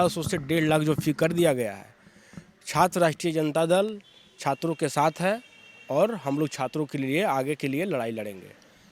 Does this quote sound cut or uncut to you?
uncut